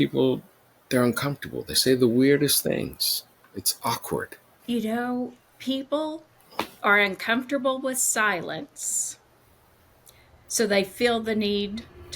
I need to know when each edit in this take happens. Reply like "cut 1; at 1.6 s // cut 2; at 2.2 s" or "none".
cut 1; at 4.4 s